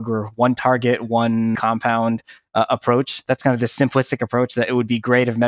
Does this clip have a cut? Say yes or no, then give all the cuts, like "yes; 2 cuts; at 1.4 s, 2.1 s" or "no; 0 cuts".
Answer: yes; 1 cut; at 1.6 s